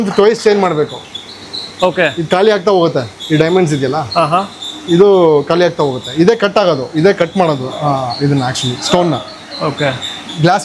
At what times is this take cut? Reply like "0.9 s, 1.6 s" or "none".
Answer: none